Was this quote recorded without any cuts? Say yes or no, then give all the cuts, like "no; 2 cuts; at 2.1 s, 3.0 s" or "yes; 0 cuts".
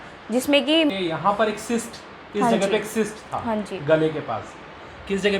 no; 1 cut; at 0.9 s